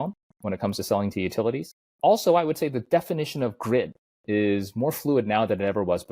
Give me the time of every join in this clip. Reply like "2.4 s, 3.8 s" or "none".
1.8 s